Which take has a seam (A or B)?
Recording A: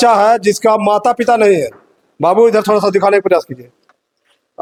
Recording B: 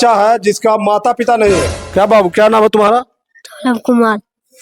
B